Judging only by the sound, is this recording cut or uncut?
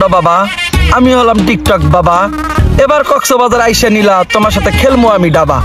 uncut